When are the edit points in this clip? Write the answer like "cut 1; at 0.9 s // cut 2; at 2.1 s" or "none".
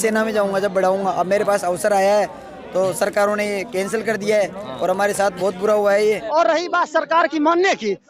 cut 1; at 6.2 s